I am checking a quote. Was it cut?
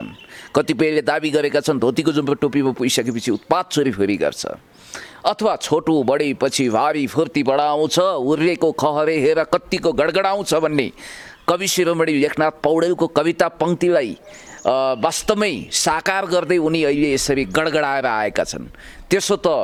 no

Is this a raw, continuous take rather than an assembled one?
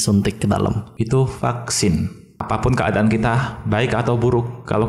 no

